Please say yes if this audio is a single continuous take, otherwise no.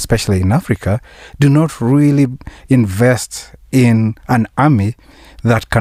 yes